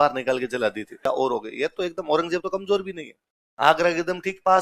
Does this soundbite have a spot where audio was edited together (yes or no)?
yes